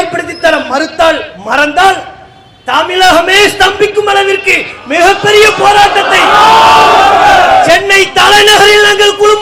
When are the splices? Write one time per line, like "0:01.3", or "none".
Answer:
none